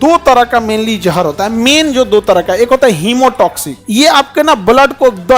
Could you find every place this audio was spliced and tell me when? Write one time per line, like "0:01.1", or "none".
0:03.7